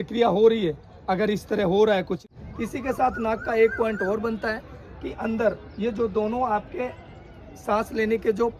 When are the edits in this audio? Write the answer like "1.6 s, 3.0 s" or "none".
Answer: 2.3 s